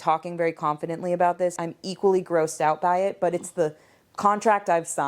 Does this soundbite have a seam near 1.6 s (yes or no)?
yes